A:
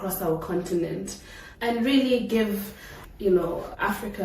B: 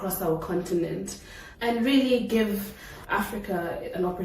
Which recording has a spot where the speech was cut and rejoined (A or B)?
B